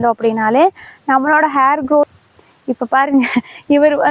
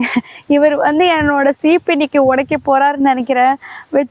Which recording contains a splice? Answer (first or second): first